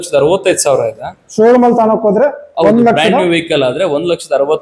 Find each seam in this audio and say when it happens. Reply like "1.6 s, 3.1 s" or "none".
none